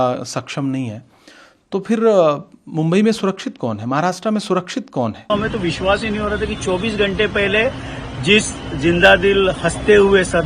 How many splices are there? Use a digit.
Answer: 1